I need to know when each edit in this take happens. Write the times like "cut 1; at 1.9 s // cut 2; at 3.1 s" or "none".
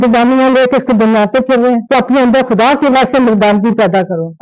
cut 1; at 1.8 s